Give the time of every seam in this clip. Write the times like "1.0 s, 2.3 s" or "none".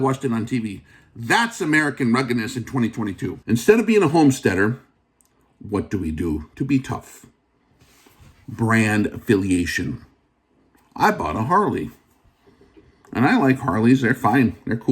3.4 s